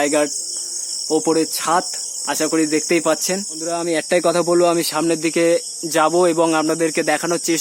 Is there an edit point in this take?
yes; 1 cut; at 3.7 s

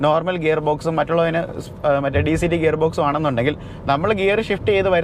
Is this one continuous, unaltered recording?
yes; 0 cuts

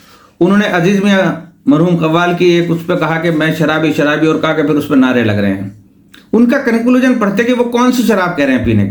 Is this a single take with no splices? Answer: yes; 0 cuts

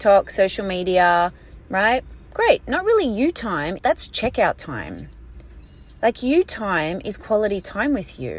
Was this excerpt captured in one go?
yes; 0 cuts

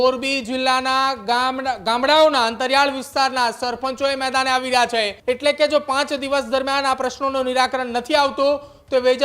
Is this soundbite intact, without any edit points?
no; 1 cut; at 5.1 s

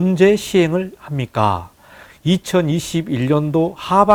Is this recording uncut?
yes; 0 cuts

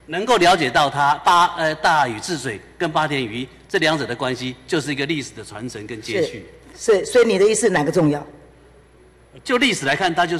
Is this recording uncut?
yes; 0 cuts

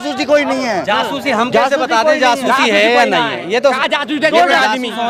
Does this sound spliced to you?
no; 0 cuts

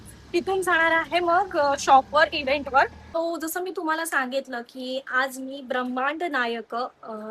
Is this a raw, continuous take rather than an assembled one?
no; 1 cut; at 3.2 s

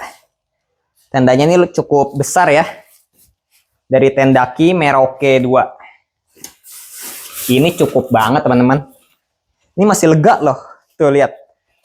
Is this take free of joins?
yes; 0 cuts

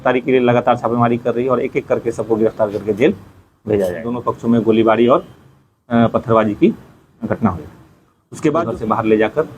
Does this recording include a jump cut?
yes; 2 cuts; at 4.2 s, 8.7 s

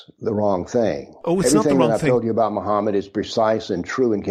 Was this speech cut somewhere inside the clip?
no; 0 cuts

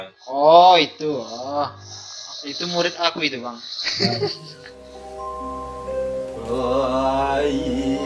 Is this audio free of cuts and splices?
yes; 0 cuts

